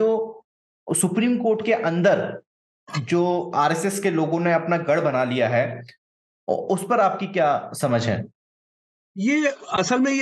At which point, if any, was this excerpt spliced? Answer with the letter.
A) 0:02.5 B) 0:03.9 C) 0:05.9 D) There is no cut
D